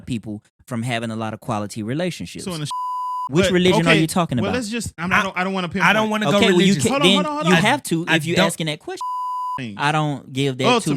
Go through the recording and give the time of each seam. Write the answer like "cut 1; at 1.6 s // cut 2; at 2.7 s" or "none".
cut 1; at 2.7 s // cut 2; at 9.2 s

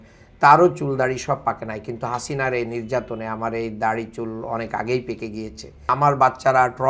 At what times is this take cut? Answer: cut 1; at 5.8 s

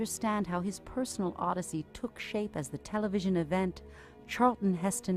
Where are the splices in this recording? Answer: cut 1; at 1.3 s

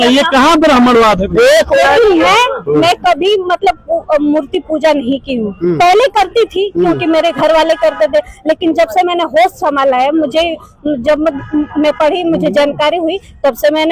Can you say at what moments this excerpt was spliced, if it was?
cut 1; at 1.8 s

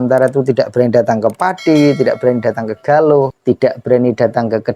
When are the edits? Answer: cut 1; at 3.4 s

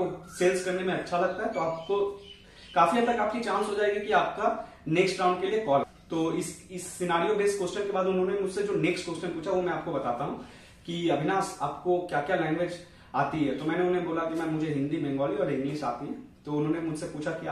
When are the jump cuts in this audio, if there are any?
none

